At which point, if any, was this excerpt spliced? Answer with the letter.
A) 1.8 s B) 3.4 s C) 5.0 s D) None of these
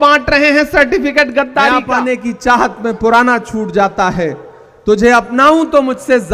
A